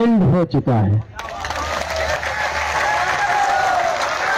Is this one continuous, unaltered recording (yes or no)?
yes